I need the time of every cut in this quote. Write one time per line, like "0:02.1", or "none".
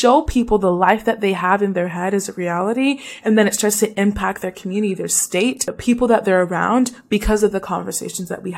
0:05.7